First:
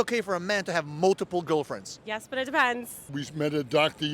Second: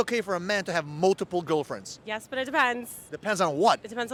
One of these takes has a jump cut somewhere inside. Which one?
first; 1 cut; at 3.0 s

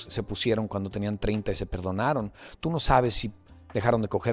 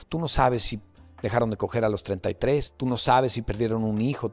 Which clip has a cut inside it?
second; 1 cut; at 2.7 s

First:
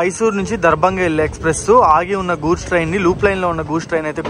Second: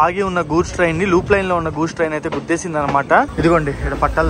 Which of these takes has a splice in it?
second; 1 cut; at 3.3 s

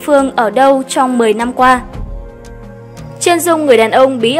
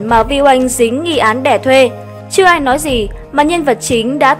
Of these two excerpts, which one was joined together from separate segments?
first; 2 cuts; at 1.8 s, 3.2 s

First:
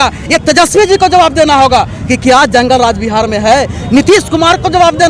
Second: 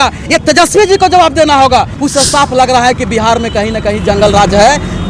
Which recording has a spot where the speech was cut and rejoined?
second; 1 cut; at 1.9 s

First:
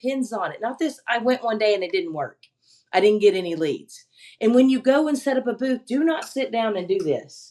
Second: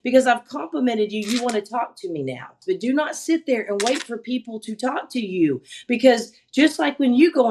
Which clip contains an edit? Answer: second; 1 cut; at 2.6 s

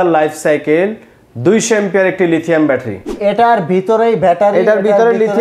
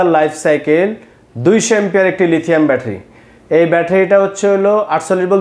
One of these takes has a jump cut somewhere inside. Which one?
first; 1 cut; at 3.1 s

